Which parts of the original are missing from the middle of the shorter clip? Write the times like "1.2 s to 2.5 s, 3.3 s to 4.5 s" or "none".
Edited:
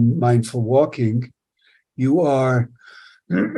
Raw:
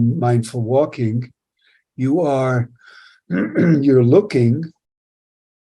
none